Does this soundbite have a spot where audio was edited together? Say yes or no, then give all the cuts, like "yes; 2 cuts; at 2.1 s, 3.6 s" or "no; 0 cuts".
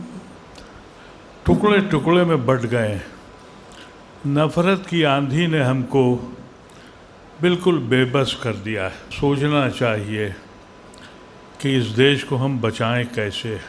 yes; 1 cut; at 9.0 s